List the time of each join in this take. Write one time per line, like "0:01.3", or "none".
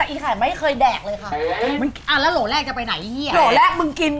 none